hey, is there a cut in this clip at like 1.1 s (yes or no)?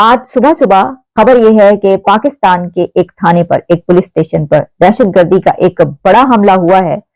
yes